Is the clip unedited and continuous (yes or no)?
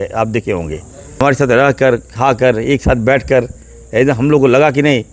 no